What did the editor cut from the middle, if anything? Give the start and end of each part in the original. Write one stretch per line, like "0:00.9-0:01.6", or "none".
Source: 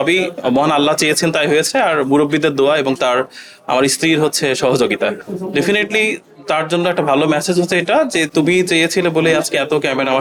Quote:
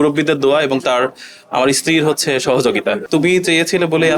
0:05.2-0:08.3